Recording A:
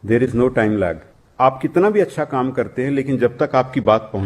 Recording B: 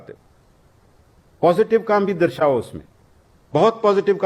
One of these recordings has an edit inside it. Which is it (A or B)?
A